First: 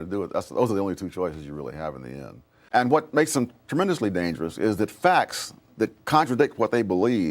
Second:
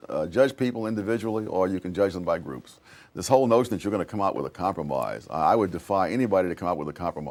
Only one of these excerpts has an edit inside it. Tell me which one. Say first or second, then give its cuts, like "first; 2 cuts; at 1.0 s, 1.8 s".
first; 1 cut; at 2.4 s